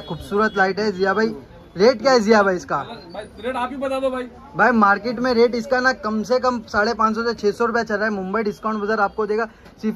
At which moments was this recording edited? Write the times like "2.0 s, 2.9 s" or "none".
none